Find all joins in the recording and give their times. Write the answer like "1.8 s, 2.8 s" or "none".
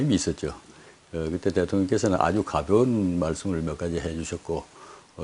2.5 s